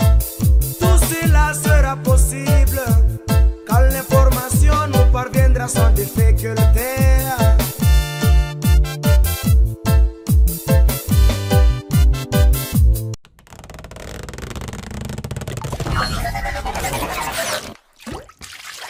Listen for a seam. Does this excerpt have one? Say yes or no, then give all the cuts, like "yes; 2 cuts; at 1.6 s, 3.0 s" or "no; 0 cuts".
no; 0 cuts